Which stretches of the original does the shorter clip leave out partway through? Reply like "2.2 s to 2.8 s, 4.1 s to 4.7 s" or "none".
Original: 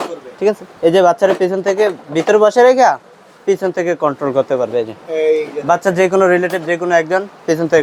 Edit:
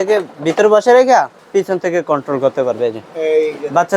3.1 s to 3.3 s